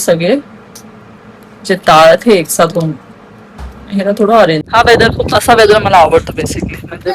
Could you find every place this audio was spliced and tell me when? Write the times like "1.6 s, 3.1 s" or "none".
4.7 s